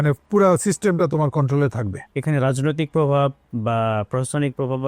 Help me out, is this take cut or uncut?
cut